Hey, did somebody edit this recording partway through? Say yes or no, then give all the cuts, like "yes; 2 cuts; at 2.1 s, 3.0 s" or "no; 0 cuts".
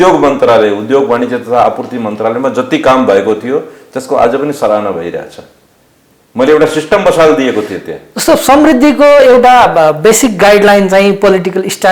no; 0 cuts